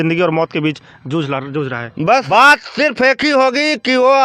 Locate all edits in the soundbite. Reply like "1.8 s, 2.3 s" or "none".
2.2 s